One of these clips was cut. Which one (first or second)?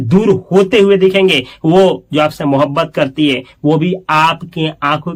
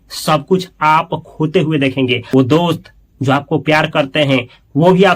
second